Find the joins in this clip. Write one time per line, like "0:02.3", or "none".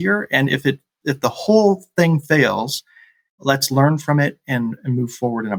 none